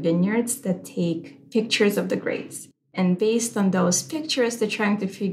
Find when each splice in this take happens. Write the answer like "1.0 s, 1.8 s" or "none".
2.9 s